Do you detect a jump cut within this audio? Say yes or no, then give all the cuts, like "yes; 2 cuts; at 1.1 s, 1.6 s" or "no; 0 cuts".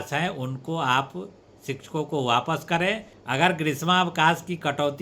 yes; 1 cut; at 3.1 s